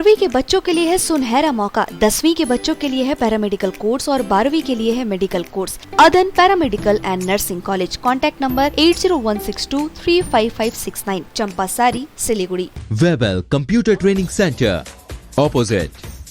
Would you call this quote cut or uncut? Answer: cut